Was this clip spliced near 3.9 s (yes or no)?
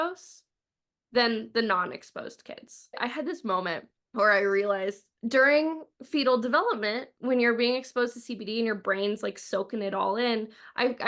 yes